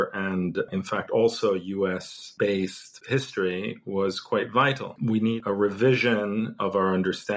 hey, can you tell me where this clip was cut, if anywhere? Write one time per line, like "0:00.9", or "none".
0:02.2
0:02.9
0:04.9